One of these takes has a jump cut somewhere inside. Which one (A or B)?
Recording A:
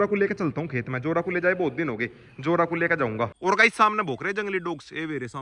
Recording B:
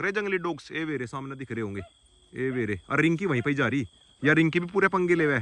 A